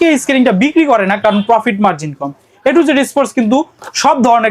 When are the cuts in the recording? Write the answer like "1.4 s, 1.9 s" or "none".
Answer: none

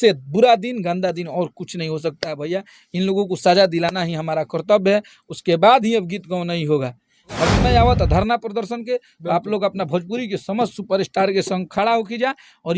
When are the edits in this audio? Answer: 7.5 s

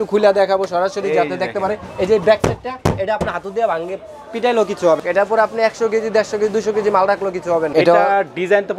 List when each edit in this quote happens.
5.0 s, 7.7 s

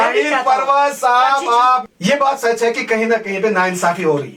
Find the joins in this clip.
1.8 s

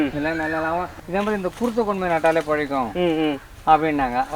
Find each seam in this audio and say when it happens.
0.9 s

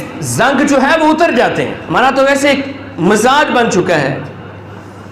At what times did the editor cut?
1.8 s

